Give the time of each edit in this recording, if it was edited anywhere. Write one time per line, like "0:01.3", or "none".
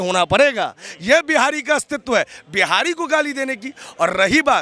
none